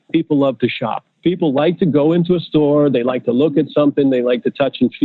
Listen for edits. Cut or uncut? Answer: cut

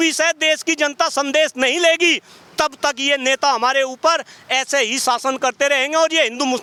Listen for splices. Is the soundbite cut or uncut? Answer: uncut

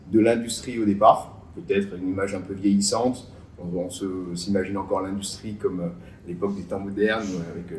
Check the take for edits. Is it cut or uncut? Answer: uncut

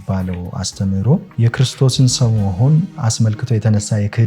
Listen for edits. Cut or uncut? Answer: cut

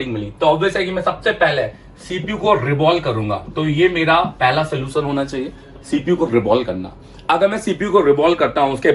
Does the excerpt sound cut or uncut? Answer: uncut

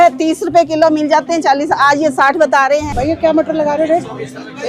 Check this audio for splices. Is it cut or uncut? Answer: cut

